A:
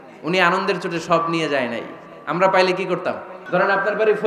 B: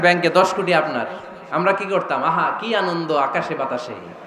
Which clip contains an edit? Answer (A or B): A